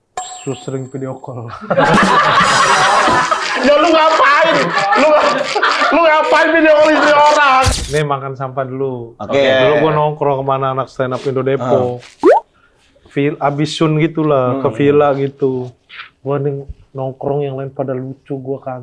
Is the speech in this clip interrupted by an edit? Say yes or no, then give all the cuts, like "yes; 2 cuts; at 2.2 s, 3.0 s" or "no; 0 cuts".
yes; 1 cut; at 7.7 s